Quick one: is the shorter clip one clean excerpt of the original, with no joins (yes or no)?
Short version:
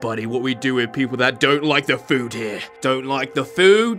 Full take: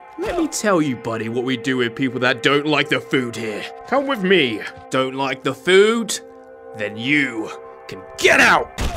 no